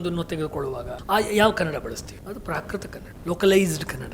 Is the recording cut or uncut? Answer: cut